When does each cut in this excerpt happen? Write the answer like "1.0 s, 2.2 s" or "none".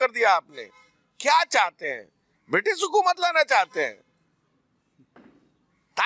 none